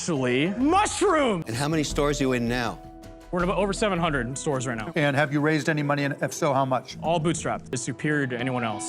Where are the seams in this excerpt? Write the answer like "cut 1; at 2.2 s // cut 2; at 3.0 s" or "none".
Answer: cut 1; at 1.4 s // cut 2; at 7.7 s